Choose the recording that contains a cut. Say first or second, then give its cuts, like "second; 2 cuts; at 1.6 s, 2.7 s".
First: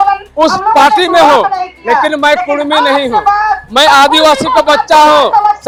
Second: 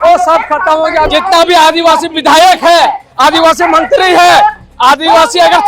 second; 1 cut; at 1.1 s